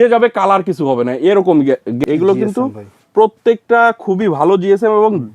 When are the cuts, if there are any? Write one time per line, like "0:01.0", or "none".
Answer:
0:02.0